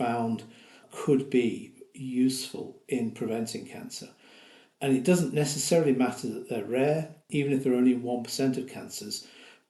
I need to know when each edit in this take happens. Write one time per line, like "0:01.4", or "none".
none